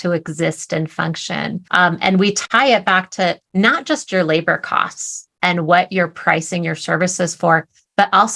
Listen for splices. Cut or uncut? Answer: cut